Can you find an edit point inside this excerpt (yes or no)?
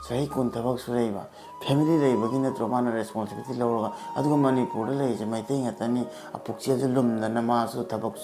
no